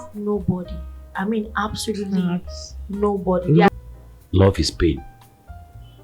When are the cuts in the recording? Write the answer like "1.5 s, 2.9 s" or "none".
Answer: 3.7 s